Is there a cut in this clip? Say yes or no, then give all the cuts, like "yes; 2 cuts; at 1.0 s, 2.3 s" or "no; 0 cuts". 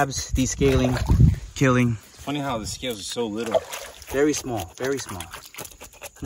no; 0 cuts